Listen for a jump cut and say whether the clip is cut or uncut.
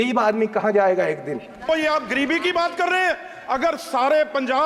cut